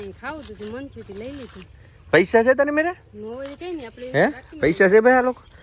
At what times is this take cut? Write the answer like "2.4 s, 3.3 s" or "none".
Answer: none

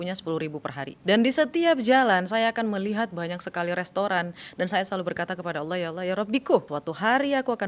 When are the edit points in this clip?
0.9 s, 6.7 s

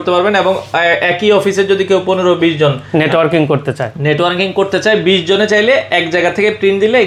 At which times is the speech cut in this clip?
none

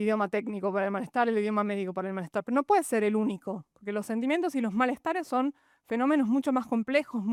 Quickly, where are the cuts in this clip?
none

